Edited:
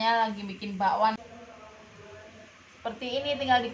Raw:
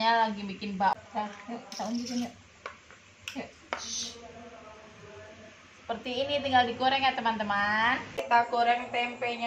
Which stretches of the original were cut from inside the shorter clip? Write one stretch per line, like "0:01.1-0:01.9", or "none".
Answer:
0:01.0-0:04.1